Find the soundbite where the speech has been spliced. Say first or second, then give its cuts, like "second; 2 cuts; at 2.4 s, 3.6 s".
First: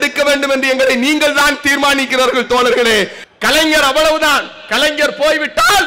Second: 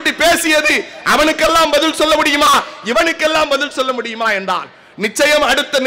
first; 1 cut; at 3.2 s